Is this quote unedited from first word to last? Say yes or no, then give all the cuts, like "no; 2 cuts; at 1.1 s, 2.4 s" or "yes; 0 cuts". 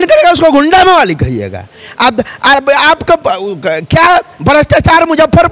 yes; 0 cuts